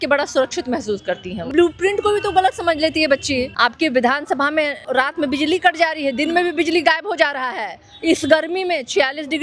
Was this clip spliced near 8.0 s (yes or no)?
no